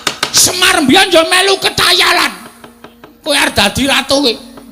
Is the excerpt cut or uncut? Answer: cut